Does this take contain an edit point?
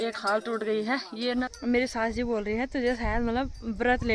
yes; 1 cut; at 1.5 s

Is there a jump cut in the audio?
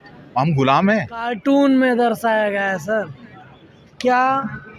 yes; 1 cut; at 1.3 s

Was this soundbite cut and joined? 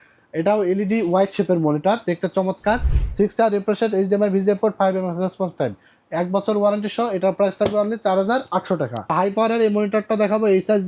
yes; 2 cuts; at 3.0 s, 9.1 s

